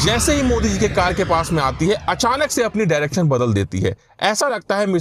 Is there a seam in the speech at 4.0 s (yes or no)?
no